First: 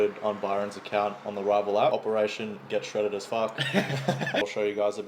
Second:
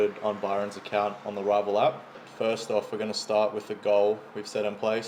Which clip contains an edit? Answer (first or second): first